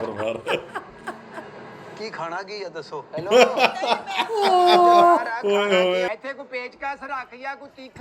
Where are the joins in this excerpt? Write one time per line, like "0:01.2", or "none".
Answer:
0:06.1